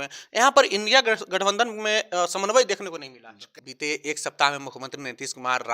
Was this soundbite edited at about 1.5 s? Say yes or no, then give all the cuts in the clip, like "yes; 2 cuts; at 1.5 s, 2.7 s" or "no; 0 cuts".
no; 1 cut; at 3.5 s